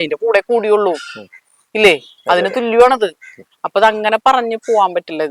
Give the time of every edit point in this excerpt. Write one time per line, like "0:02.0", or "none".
none